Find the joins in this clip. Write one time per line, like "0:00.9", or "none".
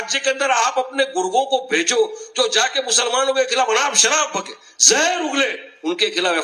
none